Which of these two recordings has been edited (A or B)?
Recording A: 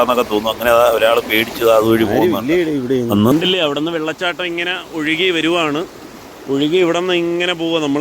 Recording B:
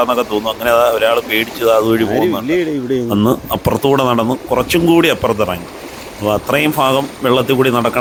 A